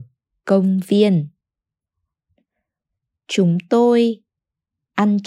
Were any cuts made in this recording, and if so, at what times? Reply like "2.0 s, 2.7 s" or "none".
2.5 s